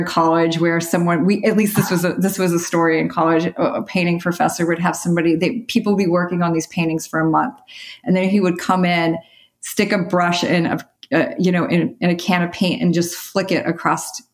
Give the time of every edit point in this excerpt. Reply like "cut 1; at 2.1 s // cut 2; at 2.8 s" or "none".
none